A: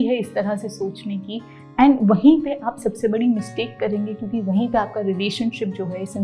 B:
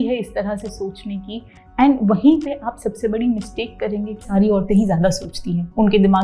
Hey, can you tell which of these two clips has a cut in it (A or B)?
B